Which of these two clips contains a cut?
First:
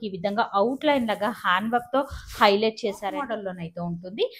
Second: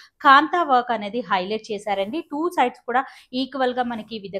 first; 1 cut; at 3.2 s

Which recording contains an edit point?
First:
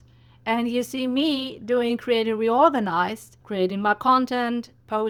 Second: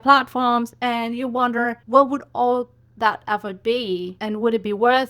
second; 2 cuts; at 1.8 s, 4.1 s

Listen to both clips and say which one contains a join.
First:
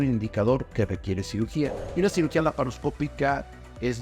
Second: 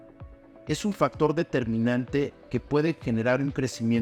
first; 1 cut; at 1.8 s

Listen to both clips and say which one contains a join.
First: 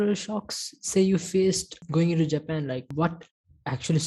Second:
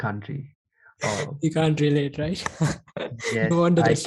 first; 2 cuts; at 1.8 s, 2.9 s

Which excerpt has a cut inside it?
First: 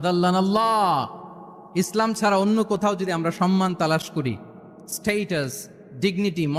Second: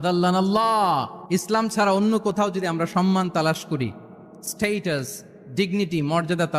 second; 1 cut; at 1.1 s

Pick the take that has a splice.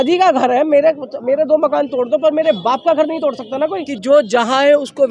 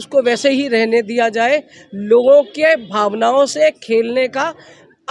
first; 1 cut; at 3.9 s

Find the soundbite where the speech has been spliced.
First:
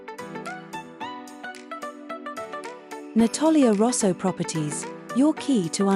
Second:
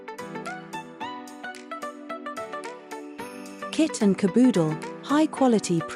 second; 1 cut; at 3.1 s

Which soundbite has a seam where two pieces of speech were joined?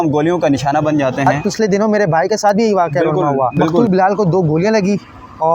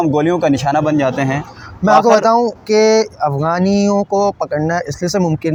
first; 2 cuts; at 1.4 s, 3.8 s

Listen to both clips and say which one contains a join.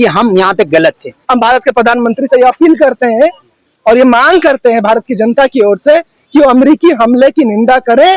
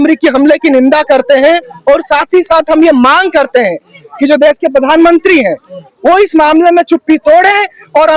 first; 1 cut; at 1.1 s

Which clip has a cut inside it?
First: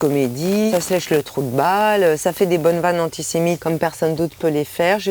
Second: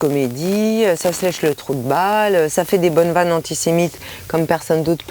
first; 2 cuts; at 0.7 s, 3.6 s

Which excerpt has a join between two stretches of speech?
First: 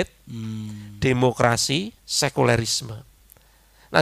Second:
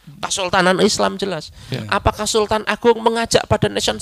first; 1 cut; at 2.0 s

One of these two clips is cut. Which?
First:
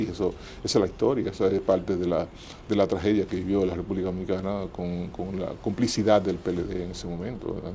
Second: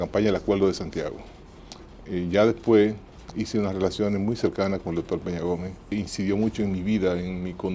second; 1 cut; at 5.9 s

